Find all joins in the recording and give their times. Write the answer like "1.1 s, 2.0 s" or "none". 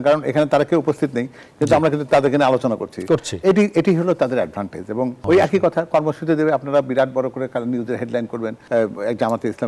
5.2 s